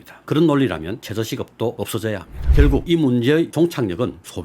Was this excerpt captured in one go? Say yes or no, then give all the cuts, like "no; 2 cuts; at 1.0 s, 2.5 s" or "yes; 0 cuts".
no; 1 cut; at 2.3 s